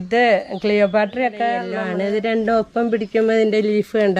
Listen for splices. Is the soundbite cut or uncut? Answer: cut